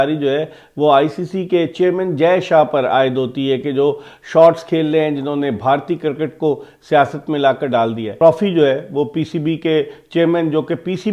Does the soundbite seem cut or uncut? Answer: cut